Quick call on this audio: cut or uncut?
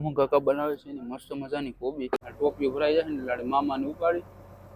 cut